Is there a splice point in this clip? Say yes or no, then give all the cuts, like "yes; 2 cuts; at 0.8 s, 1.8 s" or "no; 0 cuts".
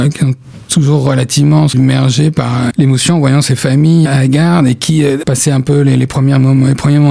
yes; 4 cuts; at 1.7 s, 2.7 s, 4.1 s, 5.2 s